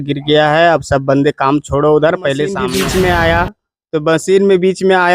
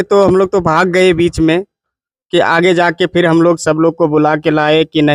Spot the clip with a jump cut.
first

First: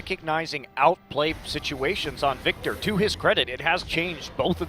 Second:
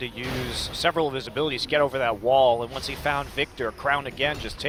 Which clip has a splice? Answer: first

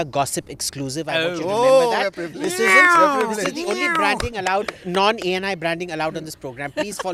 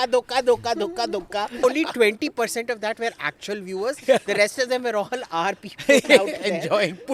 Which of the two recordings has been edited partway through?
second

